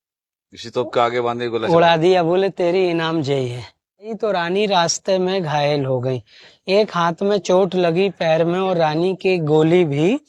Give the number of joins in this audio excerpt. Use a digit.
1